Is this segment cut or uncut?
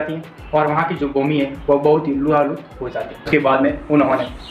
cut